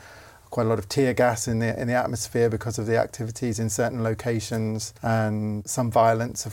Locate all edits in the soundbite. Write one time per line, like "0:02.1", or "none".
0:04.9
0:05.6